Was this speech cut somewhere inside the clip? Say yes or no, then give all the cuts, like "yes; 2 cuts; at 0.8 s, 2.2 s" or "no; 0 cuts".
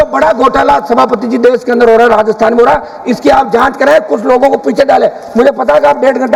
no; 0 cuts